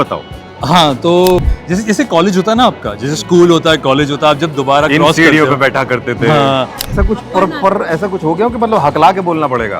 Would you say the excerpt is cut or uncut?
cut